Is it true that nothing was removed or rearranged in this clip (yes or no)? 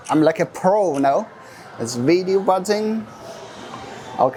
yes